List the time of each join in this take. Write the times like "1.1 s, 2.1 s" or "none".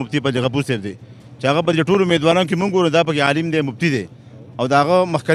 none